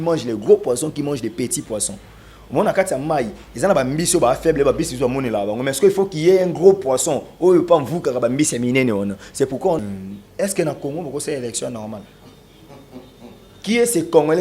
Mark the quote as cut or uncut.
cut